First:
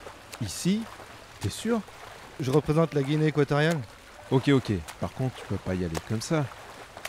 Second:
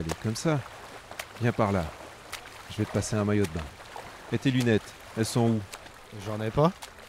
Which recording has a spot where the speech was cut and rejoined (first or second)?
first